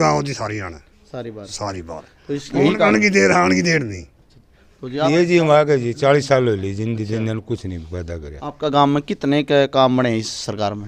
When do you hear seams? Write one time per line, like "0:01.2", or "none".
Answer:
0:05.1

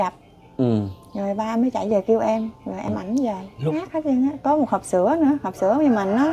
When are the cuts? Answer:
0:03.7

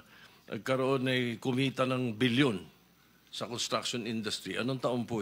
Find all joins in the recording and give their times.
none

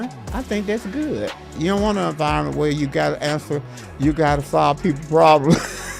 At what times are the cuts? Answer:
0:01.5

